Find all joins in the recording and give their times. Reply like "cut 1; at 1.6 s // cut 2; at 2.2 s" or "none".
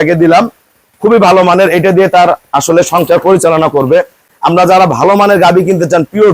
cut 1; at 4.2 s